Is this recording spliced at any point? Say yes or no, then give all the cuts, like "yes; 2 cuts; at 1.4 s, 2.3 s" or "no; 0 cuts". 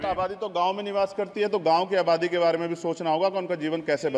no; 0 cuts